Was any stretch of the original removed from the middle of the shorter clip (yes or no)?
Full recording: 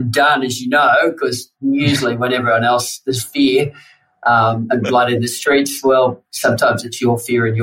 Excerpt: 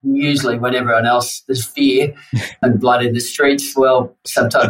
yes